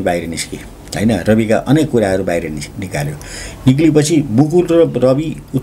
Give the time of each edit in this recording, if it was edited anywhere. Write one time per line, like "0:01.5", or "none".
none

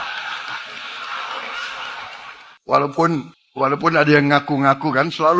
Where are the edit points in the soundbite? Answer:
0:02.5
0:03.4

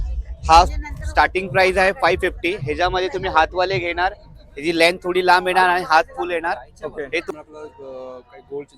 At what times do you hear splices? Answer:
0:07.3

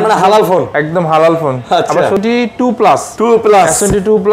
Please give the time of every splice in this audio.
0:02.2

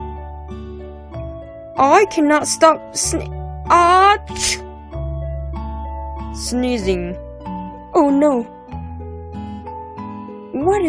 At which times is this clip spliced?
0:01.4

